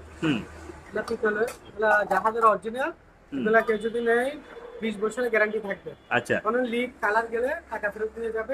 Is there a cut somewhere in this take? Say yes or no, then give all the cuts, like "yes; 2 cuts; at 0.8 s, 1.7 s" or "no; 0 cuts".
no; 0 cuts